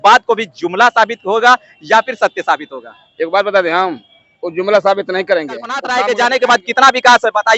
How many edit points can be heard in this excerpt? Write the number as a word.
one